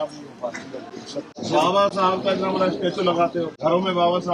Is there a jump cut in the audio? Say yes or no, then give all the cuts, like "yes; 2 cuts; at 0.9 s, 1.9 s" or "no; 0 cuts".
yes; 2 cuts; at 1.3 s, 3.5 s